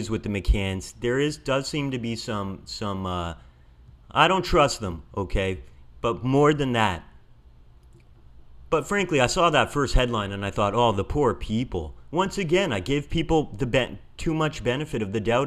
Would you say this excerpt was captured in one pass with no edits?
yes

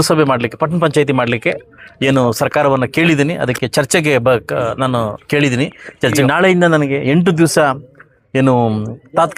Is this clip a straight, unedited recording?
no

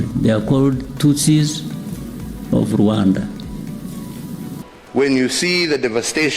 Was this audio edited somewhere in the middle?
yes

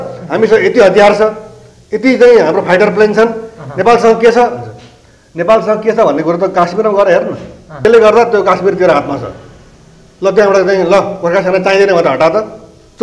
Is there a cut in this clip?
yes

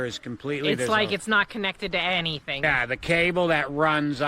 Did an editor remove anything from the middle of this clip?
yes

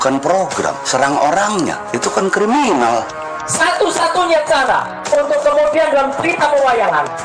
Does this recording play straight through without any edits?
no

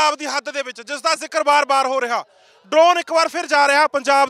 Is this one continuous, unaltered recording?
yes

